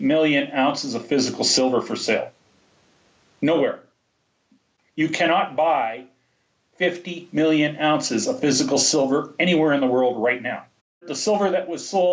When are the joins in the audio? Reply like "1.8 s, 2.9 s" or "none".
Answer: 11.1 s